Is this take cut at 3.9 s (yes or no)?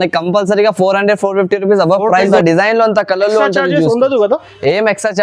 no